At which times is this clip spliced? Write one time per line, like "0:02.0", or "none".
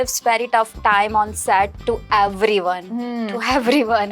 none